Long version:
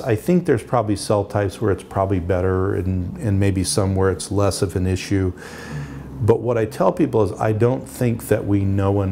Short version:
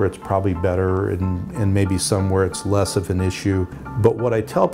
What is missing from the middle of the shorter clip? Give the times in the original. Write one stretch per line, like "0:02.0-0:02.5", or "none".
0:05.5-0:06.1